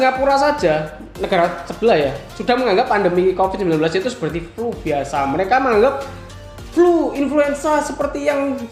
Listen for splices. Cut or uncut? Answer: uncut